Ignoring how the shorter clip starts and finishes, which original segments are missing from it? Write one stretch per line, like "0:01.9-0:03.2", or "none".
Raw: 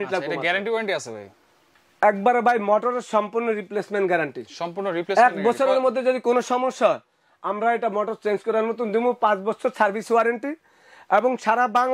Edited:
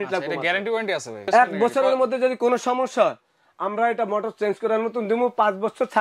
0:01.2-0:05.1